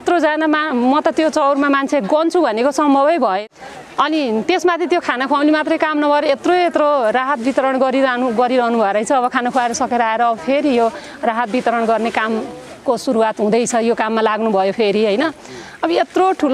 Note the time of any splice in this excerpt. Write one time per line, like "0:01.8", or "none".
0:03.4